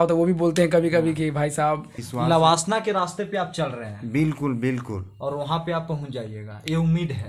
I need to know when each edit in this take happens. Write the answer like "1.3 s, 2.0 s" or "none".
2.0 s